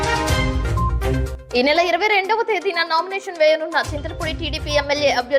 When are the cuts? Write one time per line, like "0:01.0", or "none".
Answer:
0:01.2